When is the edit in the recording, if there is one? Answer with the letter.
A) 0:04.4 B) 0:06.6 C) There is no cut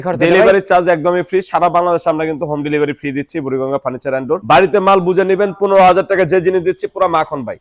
C